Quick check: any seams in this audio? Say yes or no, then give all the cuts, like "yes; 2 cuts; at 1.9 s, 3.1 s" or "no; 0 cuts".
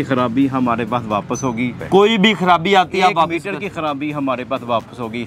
yes; 1 cut; at 1.8 s